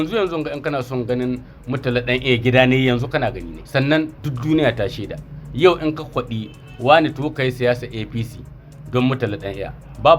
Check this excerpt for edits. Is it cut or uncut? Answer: uncut